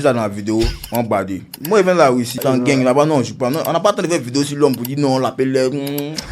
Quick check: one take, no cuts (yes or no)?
no